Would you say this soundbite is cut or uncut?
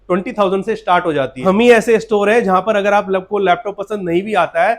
cut